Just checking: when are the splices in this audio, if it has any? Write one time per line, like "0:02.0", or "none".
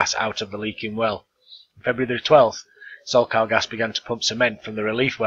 0:01.7

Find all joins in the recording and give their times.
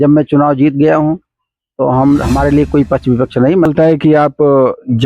0:03.7

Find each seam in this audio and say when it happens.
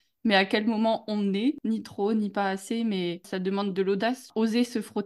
0:01.6
0:03.3
0:04.3

